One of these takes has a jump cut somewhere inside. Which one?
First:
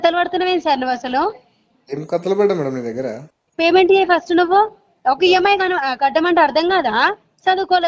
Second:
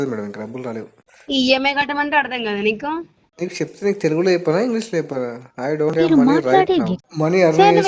second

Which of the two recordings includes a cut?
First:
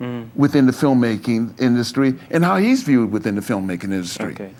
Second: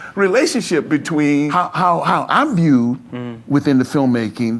second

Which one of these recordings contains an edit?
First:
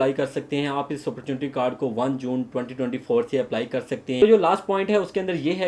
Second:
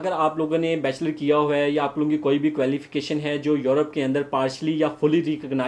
first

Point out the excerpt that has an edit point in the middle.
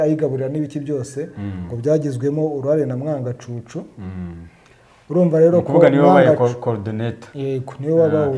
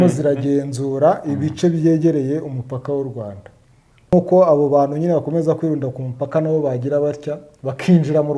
second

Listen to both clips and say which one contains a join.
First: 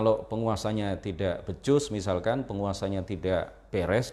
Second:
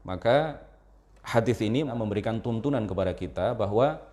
second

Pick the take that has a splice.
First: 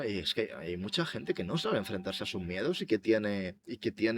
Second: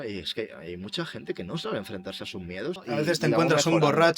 second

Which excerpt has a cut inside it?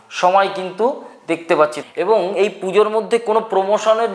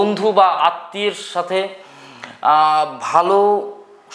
first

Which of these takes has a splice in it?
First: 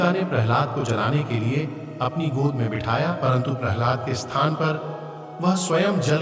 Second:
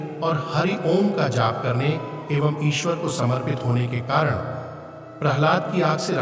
first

